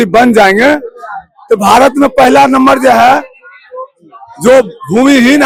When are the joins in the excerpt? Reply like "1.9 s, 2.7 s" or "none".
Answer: none